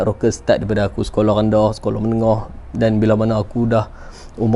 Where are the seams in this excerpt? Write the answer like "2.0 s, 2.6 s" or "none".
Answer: none